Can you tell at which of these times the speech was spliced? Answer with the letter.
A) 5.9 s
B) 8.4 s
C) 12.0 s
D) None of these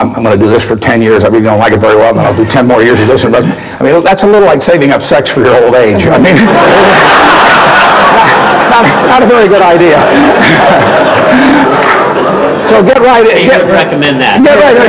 D